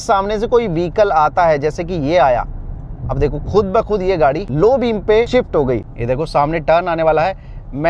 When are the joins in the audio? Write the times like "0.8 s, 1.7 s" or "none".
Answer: 4.5 s, 5.9 s